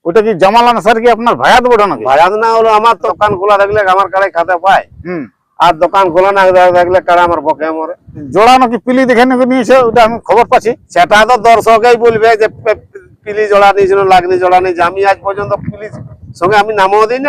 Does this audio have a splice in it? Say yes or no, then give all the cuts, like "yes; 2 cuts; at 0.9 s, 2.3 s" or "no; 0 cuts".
yes; 2 cuts; at 3.1 s, 8.2 s